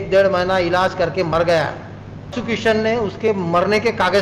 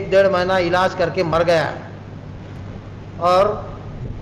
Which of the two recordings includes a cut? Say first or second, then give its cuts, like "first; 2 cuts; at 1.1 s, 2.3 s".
first; 1 cut; at 2.4 s